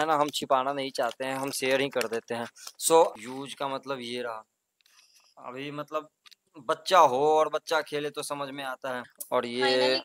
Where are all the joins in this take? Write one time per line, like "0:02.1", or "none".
0:03.1
0:09.2